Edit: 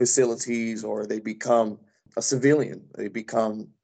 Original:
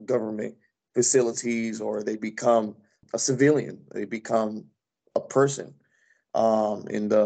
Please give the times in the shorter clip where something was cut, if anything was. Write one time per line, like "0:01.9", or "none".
none